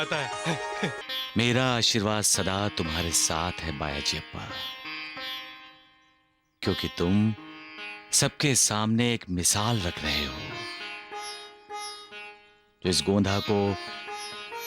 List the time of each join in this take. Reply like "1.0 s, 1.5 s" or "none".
1.0 s